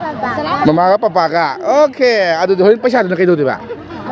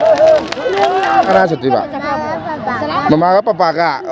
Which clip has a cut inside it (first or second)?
second